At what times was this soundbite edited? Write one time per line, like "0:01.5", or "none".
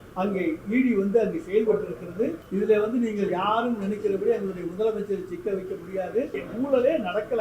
0:02.4
0:06.4